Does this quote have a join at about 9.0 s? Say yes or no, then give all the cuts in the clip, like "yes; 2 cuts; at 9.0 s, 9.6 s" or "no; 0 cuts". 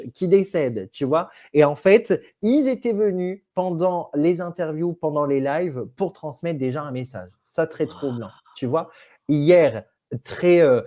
no; 0 cuts